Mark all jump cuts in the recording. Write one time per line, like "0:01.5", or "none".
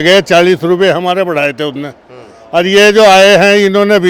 none